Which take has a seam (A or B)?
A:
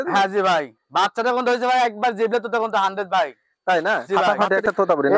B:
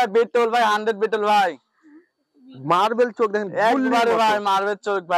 A